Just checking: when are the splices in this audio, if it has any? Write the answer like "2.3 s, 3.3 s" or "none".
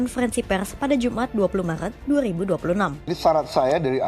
3.0 s